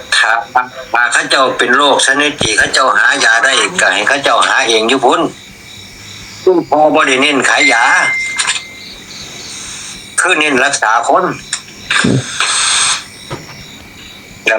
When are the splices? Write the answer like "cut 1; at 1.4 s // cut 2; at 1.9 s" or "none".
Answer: none